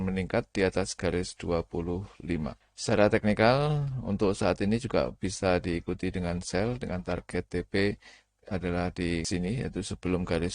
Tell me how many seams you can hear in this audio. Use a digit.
2